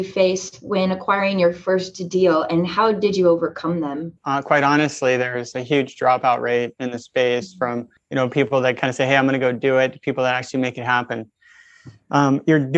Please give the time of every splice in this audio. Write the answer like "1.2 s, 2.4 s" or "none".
4.2 s, 7.9 s

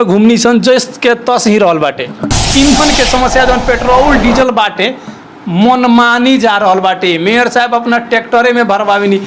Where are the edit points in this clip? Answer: 2.2 s

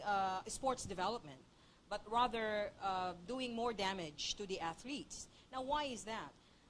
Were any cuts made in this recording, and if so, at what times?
3.0 s

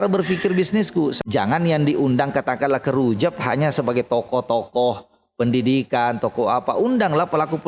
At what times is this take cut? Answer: 1.2 s

